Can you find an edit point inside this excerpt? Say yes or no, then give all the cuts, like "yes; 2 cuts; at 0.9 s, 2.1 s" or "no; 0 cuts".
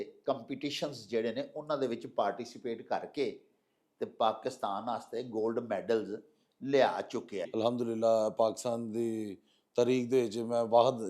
yes; 1 cut; at 7.5 s